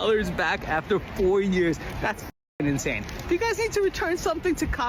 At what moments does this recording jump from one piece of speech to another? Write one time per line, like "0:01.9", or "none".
none